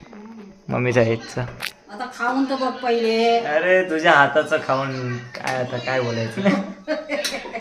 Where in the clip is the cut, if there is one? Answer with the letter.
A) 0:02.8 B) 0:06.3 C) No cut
B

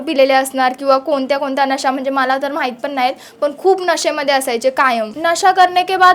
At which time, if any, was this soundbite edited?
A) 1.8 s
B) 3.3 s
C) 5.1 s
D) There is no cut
C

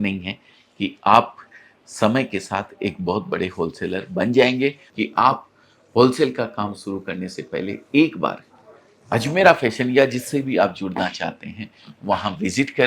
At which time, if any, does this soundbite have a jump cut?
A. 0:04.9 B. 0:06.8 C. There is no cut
A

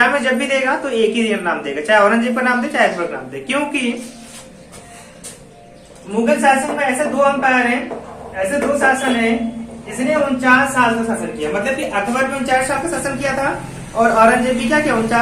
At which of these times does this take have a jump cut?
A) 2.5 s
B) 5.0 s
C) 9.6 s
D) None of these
D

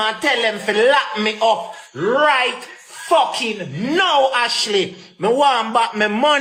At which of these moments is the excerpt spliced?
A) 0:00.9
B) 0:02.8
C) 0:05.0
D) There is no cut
D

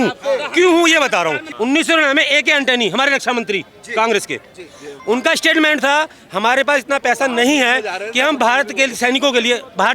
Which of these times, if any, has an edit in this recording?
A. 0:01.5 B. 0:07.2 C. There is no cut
A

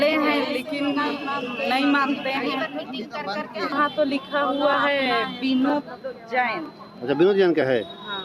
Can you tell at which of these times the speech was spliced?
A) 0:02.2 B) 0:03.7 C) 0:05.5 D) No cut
B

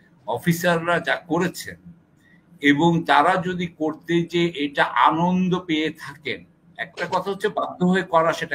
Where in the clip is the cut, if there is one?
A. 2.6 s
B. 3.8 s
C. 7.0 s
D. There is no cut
D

